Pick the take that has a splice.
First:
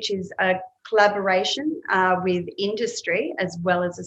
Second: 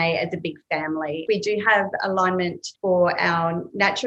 second; 2 cuts; at 1.2 s, 2.6 s

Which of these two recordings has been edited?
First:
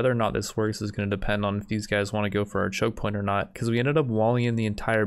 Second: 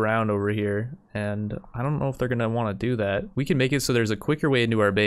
second; 1 cut; at 3.3 s

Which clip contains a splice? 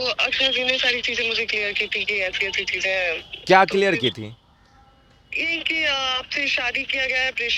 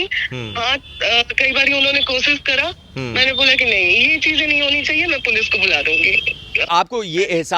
second; 1 cut; at 6.7 s

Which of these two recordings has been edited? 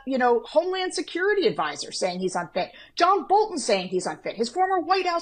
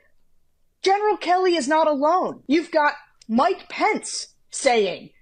second; 1 cut; at 2.4 s

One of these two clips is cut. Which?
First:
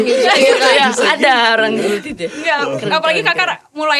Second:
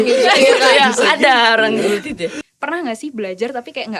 second; 1 cut; at 2.4 s

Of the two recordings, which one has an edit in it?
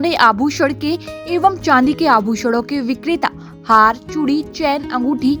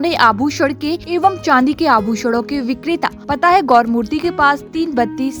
second; 2 cuts; at 1.0 s, 3.2 s

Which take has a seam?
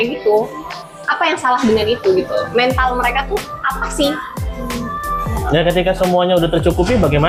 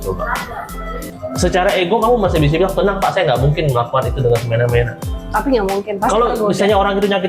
second; 1 cut; at 1.0 s

